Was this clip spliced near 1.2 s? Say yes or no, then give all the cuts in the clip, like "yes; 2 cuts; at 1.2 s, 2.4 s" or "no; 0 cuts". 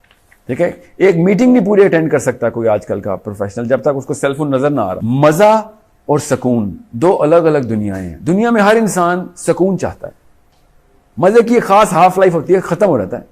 no; 1 cut; at 5.0 s